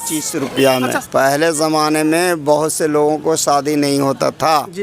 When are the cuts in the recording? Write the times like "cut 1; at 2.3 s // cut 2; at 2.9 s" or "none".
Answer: cut 1; at 1.0 s